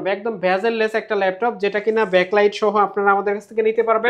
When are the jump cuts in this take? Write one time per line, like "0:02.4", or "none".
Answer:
none